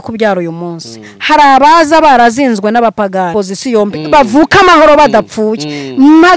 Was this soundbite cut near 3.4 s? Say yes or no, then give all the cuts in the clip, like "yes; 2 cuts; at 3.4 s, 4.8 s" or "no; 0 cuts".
yes; 1 cut; at 3.4 s